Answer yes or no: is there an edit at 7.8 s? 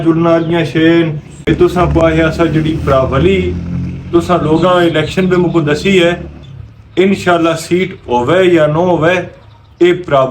no